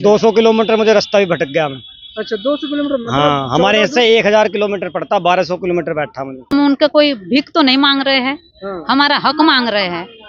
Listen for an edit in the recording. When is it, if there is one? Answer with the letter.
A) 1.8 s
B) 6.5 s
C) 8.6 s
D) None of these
B